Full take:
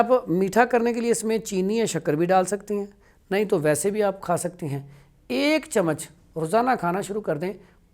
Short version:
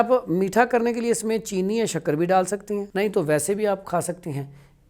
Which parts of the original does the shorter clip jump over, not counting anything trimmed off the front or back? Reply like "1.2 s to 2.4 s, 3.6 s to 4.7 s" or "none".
2.9 s to 3.2 s